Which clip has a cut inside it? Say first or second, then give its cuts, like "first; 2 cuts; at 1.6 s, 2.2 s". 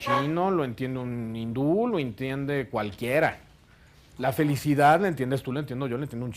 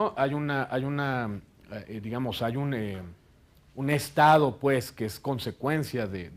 first; 1 cut; at 5.2 s